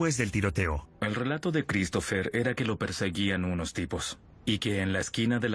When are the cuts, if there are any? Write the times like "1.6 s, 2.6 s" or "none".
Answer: none